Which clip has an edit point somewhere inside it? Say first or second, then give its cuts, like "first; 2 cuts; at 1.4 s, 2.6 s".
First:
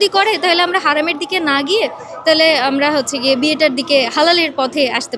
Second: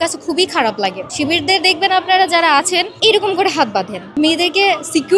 second; 3 cuts; at 1.0 s, 2.9 s, 4.1 s